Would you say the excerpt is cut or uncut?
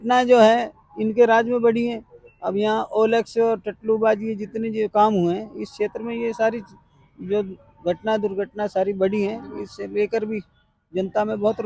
uncut